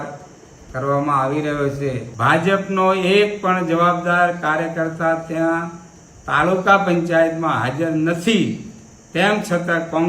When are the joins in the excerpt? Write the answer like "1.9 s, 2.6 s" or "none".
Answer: 2.1 s